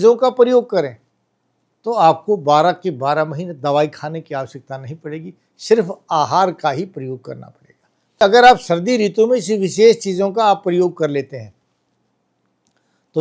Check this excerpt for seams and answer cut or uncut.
cut